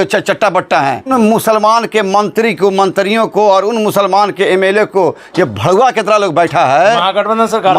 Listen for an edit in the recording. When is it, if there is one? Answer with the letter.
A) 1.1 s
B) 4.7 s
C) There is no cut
A